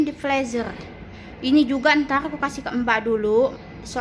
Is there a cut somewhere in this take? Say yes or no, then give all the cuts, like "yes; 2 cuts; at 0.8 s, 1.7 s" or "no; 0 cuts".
no; 0 cuts